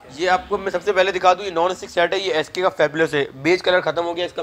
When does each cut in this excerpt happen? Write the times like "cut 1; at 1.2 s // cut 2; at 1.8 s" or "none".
none

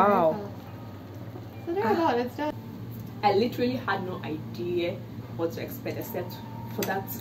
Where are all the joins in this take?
cut 1; at 2.6 s

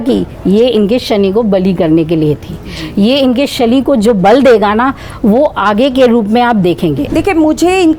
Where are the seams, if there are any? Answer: cut 1; at 7.0 s

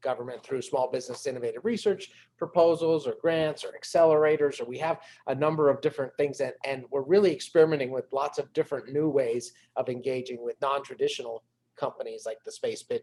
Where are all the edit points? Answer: none

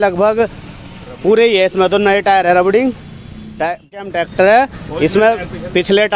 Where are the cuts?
cut 1; at 4.0 s

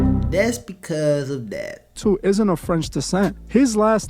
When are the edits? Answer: cut 1; at 2.0 s

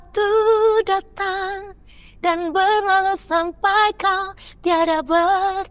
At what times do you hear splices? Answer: none

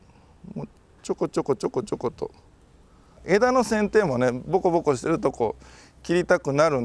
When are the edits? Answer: cut 1; at 3.2 s

